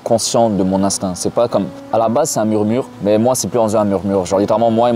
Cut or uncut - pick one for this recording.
cut